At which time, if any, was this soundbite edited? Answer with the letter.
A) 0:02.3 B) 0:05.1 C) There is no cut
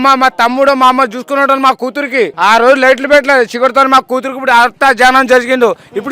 A